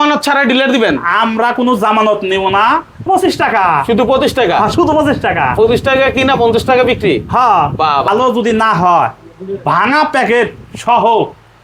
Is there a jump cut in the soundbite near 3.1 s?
yes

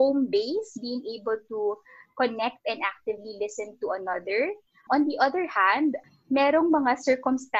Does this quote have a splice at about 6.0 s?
yes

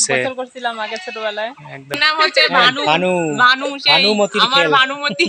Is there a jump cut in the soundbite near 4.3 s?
no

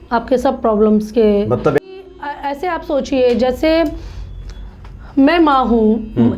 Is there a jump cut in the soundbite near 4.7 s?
no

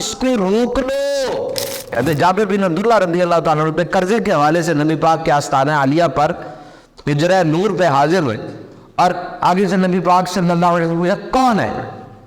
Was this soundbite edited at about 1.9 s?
yes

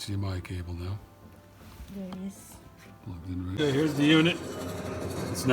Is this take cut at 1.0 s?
no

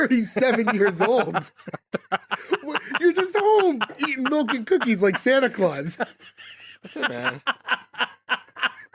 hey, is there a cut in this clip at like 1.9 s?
no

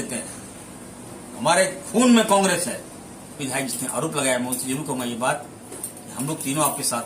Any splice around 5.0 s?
no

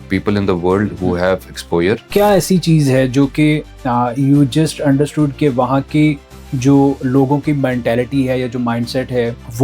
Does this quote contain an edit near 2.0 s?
yes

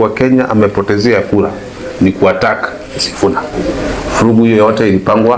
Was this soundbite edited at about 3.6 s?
yes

